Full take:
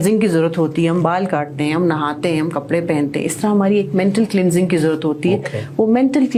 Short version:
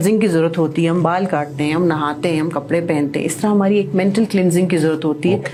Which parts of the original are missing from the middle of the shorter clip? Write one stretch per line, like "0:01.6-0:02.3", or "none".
none